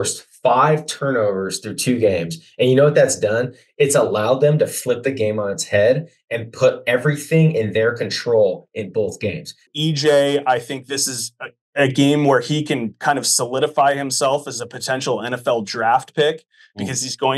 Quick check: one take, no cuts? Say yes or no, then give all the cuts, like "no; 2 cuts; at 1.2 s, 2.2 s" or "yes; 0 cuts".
no; 1 cut; at 9.7 s